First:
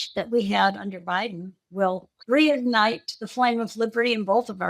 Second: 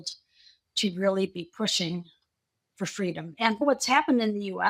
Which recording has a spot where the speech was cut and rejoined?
first; 1 cut; at 2.1 s

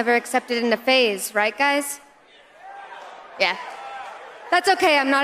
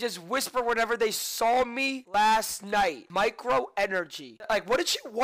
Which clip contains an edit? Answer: second; 3 cuts; at 2.0 s, 3.0 s, 4.3 s

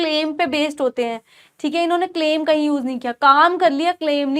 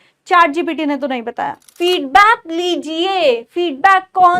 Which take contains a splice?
second; 1 cut; at 1.6 s

